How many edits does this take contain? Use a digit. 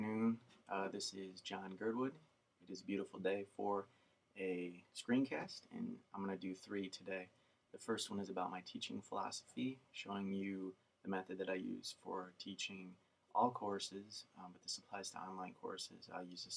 0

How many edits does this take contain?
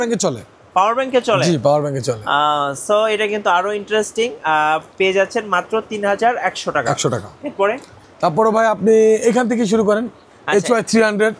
0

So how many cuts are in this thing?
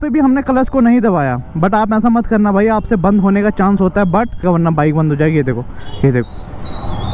1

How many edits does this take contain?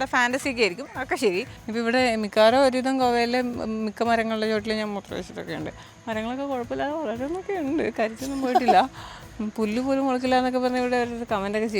1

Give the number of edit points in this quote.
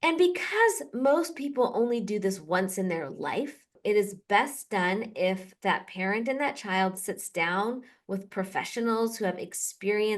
1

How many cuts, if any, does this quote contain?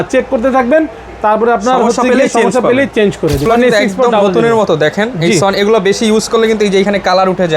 1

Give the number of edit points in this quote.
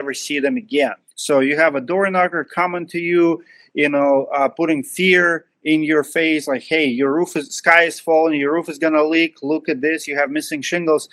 1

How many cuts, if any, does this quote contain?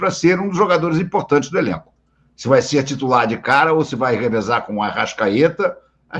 0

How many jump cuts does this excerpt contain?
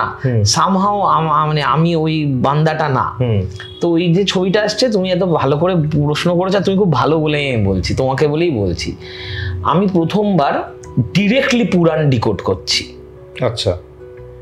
0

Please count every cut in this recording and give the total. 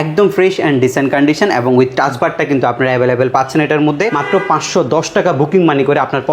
1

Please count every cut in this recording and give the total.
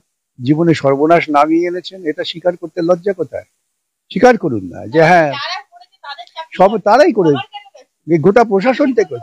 0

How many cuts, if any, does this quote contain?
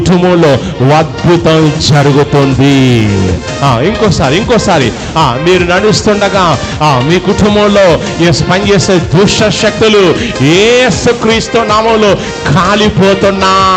0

